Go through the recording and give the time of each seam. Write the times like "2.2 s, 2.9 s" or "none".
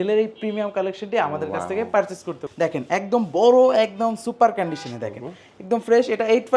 2.4 s

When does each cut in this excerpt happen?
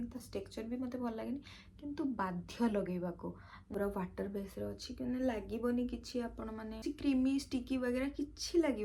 3.5 s, 6.8 s

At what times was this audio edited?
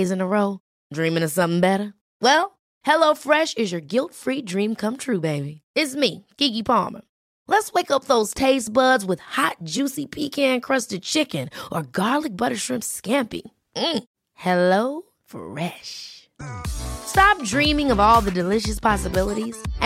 none

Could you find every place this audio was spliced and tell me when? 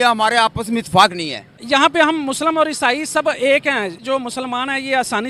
1.6 s, 4.0 s

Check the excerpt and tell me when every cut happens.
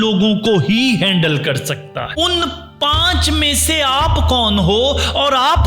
2.1 s

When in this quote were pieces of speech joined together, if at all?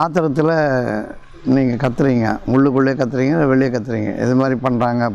none

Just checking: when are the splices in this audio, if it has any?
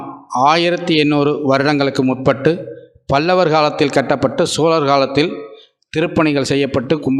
none

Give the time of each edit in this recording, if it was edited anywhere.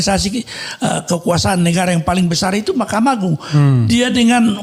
none

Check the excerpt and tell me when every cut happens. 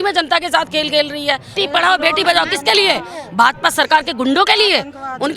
1.5 s

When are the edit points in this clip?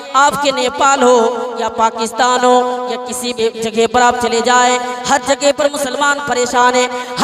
3.3 s

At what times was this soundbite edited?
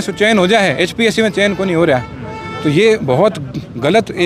none

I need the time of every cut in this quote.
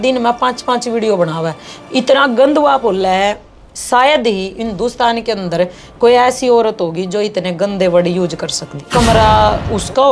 8.9 s

